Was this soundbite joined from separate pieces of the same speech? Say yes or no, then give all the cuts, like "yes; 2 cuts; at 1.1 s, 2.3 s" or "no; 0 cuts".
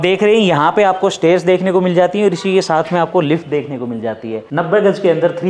yes; 1 cut; at 4.4 s